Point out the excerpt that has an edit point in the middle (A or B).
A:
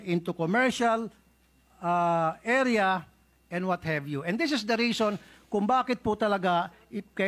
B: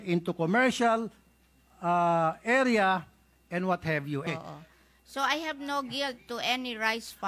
B